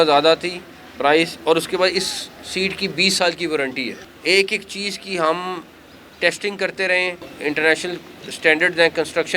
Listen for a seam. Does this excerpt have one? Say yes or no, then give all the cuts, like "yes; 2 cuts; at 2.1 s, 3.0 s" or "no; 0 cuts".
yes; 2 cuts; at 4.0 s, 7.3 s